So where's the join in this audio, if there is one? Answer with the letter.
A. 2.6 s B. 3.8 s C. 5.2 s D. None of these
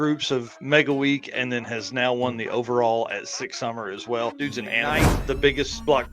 C